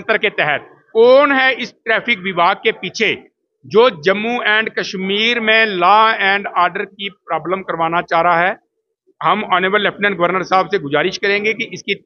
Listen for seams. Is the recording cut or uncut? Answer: uncut